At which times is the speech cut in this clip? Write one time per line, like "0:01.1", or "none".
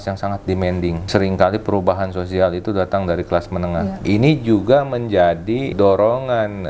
0:01.0
0:04.0
0:05.7